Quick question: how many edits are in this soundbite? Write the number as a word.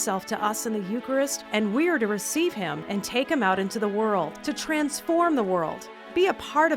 zero